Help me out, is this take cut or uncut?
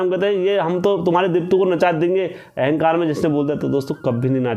uncut